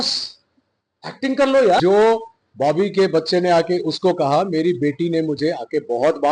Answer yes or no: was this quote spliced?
yes